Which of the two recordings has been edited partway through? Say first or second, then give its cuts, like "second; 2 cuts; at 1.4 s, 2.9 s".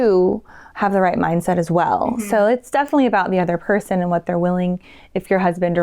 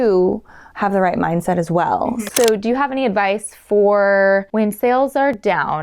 second; 2 cuts; at 2.2 s, 4.5 s